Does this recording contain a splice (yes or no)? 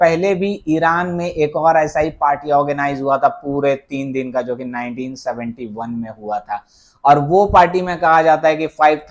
no